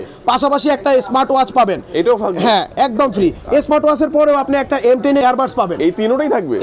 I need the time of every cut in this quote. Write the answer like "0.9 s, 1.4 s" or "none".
5.2 s